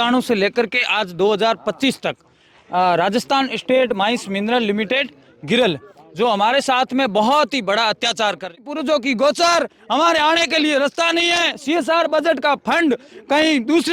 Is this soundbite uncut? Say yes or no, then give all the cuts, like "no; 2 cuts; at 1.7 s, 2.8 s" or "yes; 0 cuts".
no; 1 cut; at 8.7 s